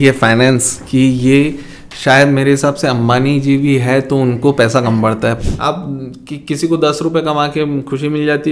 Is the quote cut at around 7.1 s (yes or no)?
no